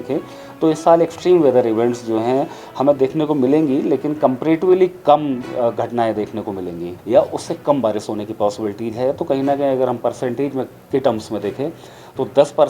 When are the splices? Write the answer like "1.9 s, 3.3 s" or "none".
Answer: 6.9 s